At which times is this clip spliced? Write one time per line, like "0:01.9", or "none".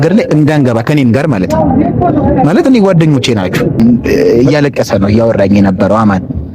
0:03.8